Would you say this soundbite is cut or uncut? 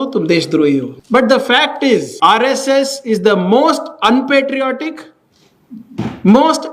cut